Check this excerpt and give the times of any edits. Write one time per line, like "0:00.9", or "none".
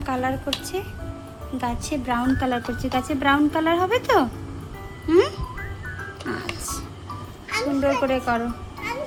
none